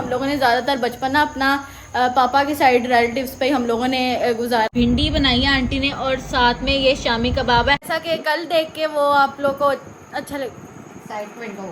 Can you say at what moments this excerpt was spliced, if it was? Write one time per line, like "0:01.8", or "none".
0:04.7
0:07.9